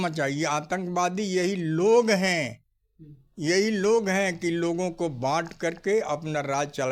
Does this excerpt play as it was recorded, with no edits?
yes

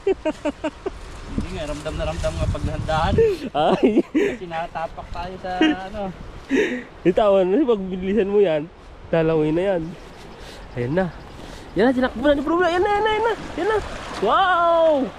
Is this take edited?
no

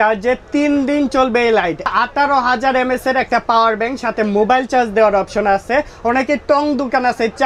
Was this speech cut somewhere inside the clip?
yes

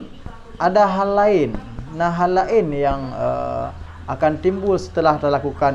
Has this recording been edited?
no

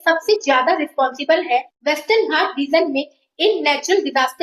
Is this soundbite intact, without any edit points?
no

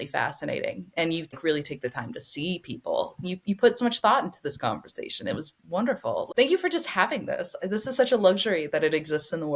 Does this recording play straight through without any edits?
no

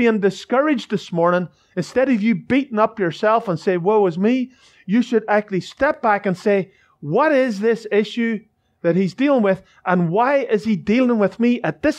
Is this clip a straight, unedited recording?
no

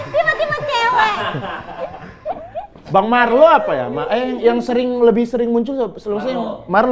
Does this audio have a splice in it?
no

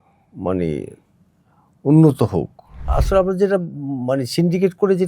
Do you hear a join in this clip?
yes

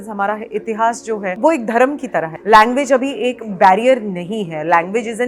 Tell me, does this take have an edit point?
yes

